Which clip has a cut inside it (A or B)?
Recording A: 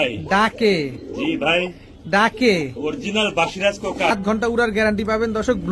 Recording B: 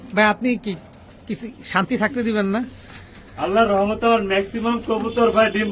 A